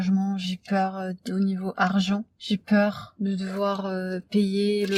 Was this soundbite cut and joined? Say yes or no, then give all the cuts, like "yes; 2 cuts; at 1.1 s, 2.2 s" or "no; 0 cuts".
no; 0 cuts